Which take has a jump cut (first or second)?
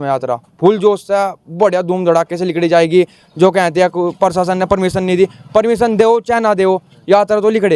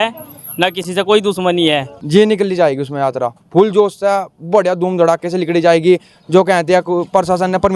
second